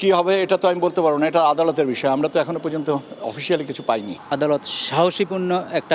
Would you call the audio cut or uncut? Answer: cut